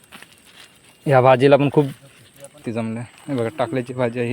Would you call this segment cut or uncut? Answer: cut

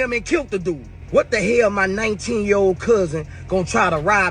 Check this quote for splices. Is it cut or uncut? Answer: cut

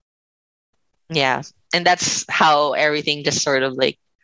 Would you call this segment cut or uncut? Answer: uncut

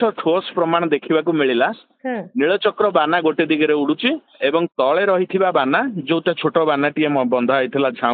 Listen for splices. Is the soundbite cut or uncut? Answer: uncut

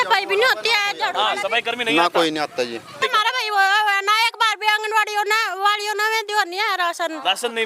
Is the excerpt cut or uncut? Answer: cut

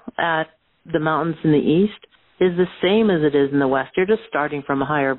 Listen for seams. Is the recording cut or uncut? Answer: uncut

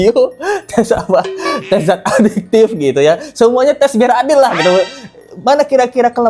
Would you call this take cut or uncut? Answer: uncut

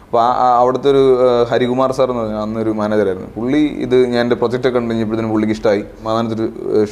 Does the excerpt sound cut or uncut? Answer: cut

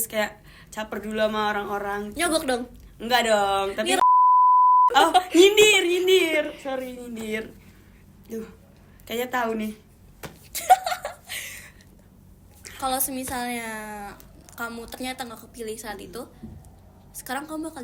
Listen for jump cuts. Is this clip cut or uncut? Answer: uncut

